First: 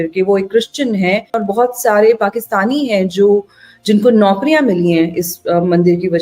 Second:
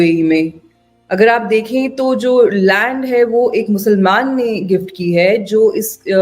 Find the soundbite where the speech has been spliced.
first; 1 cut; at 1.4 s

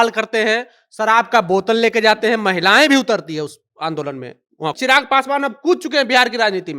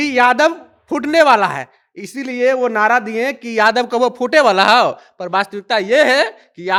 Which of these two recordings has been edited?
first; 1 cut; at 4.8 s

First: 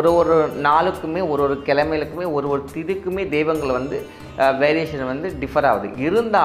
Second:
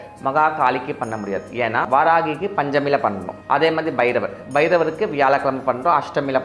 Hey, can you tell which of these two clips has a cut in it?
second; 1 cut; at 1.9 s

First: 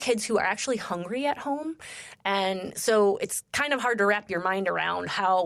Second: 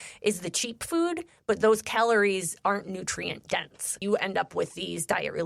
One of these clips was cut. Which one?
second; 1 cut; at 4.0 s

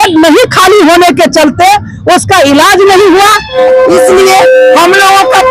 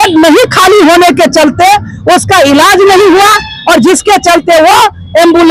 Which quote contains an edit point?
first; 1 cut; at 3.5 s

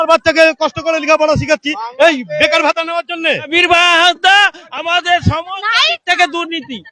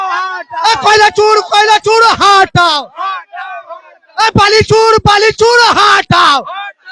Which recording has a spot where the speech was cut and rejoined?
first; 1 cut; at 3.5 s

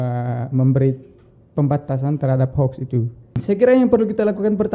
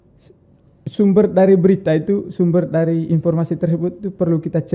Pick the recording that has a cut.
first; 1 cut; at 3.4 s

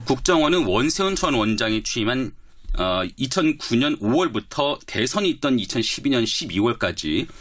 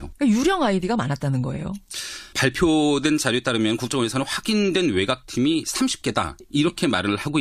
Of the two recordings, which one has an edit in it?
first; 1 cut; at 3.8 s

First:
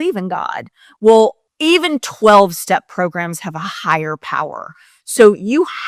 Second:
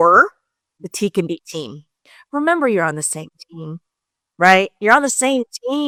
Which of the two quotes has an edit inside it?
first; 1 cut; at 1.5 s

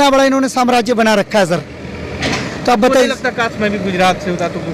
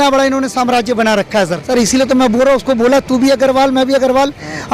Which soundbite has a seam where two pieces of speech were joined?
second; 1 cut; at 1.6 s

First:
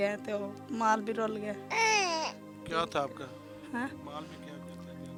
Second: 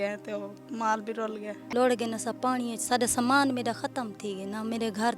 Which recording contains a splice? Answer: second; 1 cut; at 1.5 s

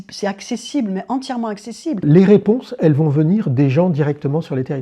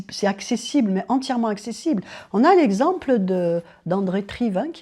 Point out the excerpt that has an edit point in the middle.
first; 1 cut; at 2.0 s

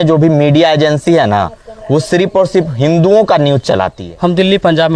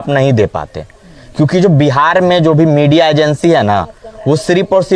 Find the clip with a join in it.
first; 1 cut; at 4.0 s

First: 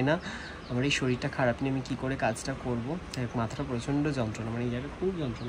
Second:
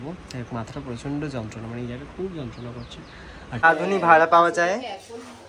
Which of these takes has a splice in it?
second; 1 cut; at 3.6 s

